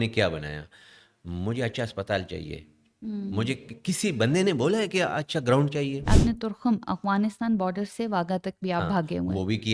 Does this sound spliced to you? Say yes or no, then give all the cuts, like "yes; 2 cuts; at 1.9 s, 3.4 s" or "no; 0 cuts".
yes; 1 cut; at 6.1 s